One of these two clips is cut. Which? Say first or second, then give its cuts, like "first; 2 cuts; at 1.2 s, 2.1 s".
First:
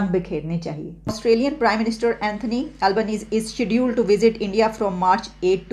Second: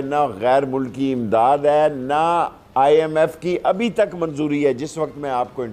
first; 1 cut; at 1.2 s